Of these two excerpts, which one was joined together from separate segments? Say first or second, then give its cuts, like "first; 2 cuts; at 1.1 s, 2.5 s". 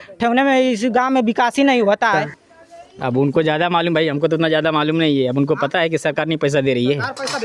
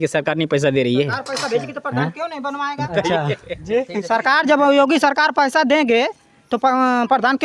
first; 1 cut; at 2.1 s